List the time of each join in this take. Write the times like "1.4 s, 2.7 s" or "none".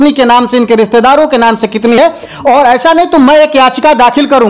none